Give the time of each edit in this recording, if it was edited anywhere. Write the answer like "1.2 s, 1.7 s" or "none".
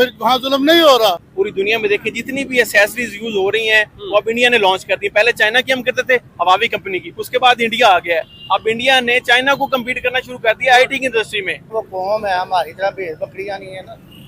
1.3 s, 11.6 s

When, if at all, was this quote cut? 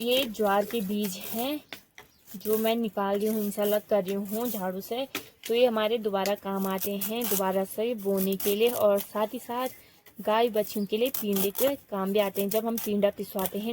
none

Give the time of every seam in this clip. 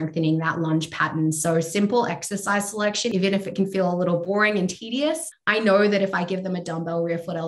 3.1 s, 4.2 s, 5.3 s

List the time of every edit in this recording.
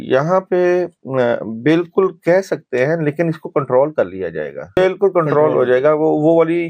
4.8 s

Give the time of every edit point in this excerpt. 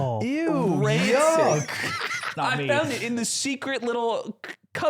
2.3 s

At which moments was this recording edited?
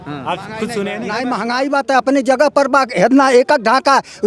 1.0 s

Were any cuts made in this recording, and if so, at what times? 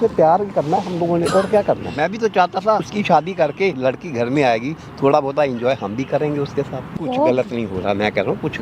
1.9 s, 2.9 s, 3.8 s, 6.9 s

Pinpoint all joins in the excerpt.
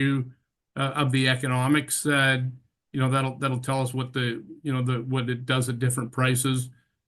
none

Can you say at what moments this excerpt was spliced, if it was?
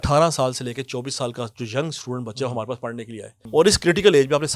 3.4 s

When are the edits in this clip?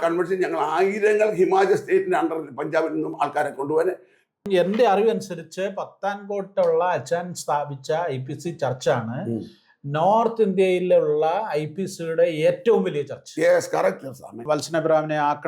4.4 s, 14.6 s

